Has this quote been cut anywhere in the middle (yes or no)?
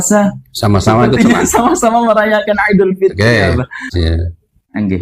yes